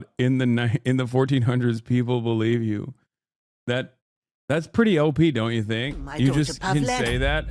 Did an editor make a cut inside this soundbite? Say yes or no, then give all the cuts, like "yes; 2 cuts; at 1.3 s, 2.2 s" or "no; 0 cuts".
no; 0 cuts